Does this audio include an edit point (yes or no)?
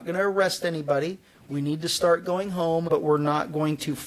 yes